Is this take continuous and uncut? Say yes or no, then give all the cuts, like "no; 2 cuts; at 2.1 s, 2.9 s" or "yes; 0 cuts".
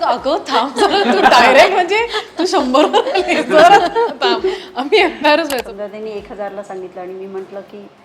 no; 1 cut; at 5.7 s